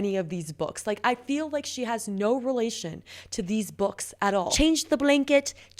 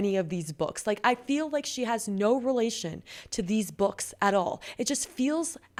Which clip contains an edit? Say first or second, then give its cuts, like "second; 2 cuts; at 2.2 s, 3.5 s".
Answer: first; 1 cut; at 4.5 s